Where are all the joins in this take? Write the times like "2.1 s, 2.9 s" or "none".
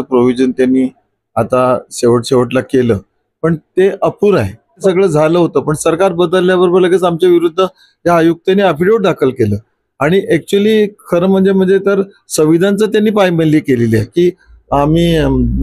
4.9 s, 14.1 s

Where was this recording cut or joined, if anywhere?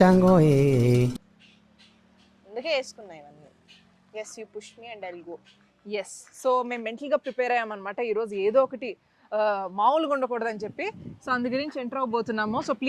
none

